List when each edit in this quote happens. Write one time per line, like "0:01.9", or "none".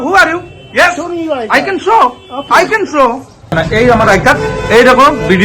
0:03.5